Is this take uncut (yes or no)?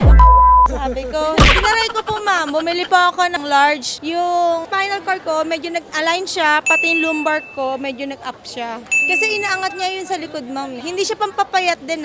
yes